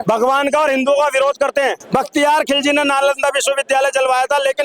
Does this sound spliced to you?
yes; 1 cut; at 1.8 s

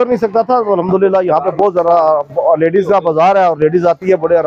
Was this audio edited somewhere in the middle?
no; 0 cuts

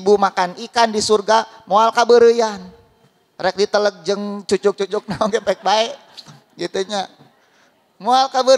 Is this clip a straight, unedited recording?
yes; 0 cuts

